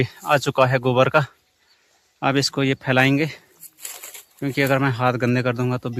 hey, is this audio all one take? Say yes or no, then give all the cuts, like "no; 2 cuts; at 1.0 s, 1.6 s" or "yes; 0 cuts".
yes; 0 cuts